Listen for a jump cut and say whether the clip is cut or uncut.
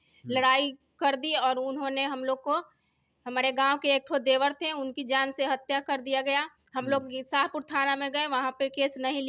uncut